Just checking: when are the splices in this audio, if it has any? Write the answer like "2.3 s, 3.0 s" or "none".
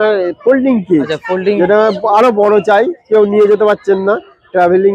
none